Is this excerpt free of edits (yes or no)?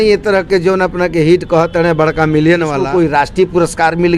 no